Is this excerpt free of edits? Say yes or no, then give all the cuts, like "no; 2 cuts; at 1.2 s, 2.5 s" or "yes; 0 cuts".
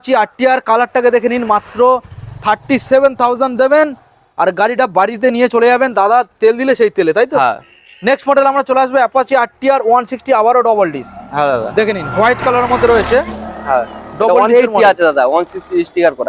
yes; 0 cuts